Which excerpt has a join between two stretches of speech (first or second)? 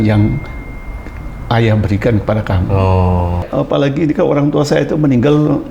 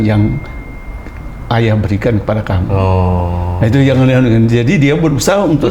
first